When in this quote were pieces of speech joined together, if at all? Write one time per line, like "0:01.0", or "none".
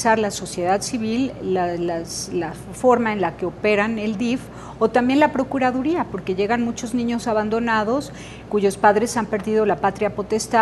0:06.8